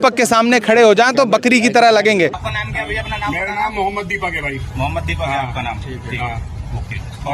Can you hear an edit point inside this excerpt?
yes; 1 cut; at 2.4 s

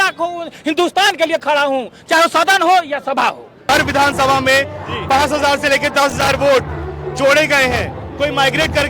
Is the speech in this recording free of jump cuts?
no; 1 cut; at 3.7 s

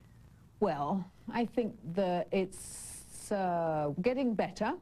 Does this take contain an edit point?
yes; 1 cut; at 1.4 s

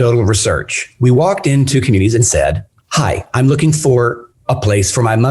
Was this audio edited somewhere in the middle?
yes; 1 cut; at 2.7 s

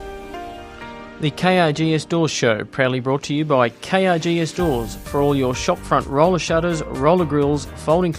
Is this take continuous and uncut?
no; 1 cut; at 1.1 s

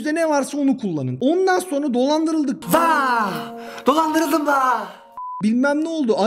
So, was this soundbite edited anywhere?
no; 0 cuts

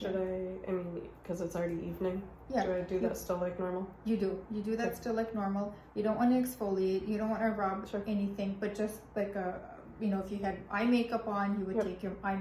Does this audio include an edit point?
no; 0 cuts

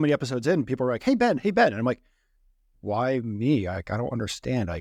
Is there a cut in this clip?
no; 0 cuts

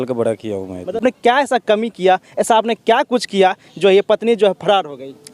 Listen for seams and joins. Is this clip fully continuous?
no; 1 cut; at 1.3 s

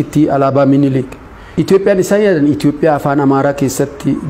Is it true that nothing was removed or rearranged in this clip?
yes; 0 cuts

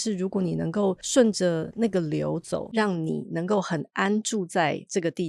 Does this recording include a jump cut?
yes; 1 cut; at 2.7 s

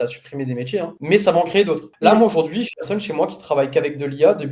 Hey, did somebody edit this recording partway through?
no; 0 cuts

